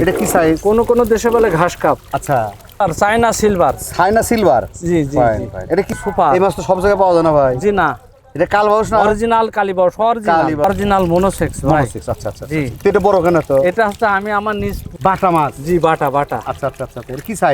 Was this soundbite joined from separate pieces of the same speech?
yes; 4 cuts; at 2.6 s, 6.0 s, 10.6 s, 14.8 s

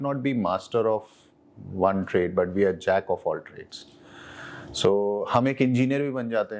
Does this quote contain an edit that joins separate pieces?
no; 0 cuts

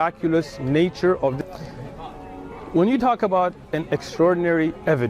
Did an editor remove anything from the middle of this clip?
yes; 1 cut; at 1.4 s

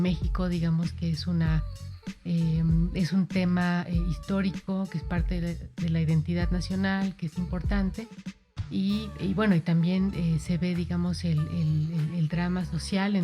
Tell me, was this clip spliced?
no; 0 cuts

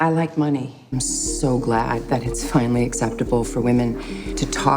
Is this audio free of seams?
no; 1 cut; at 0.9 s

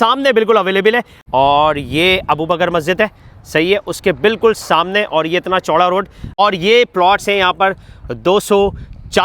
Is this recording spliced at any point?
yes; 2 cuts; at 1.1 s, 6.4 s

